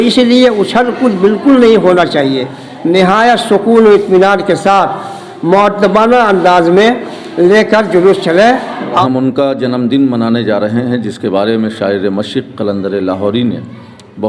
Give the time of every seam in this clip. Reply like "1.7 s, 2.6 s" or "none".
9.0 s